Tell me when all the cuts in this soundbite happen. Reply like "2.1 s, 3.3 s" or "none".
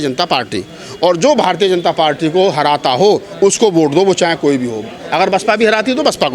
none